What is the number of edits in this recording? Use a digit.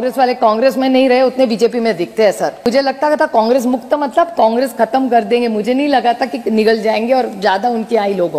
1